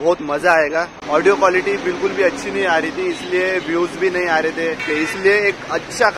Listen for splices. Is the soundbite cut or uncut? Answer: cut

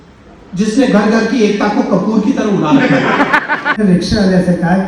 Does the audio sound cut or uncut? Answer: cut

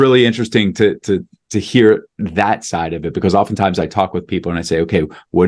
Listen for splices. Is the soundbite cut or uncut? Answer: uncut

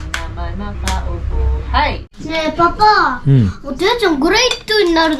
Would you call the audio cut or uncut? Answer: cut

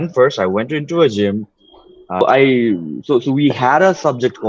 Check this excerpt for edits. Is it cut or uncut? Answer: cut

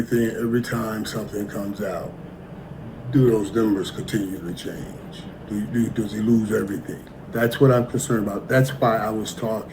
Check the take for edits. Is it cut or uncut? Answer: cut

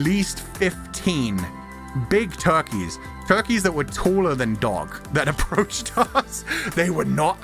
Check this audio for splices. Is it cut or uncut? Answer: uncut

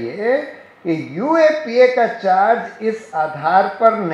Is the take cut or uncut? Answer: uncut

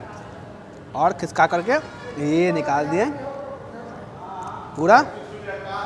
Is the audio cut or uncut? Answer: uncut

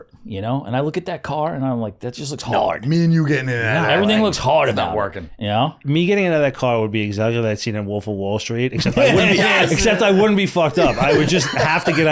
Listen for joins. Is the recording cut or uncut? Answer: uncut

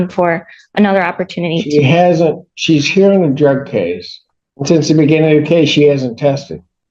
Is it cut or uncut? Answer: uncut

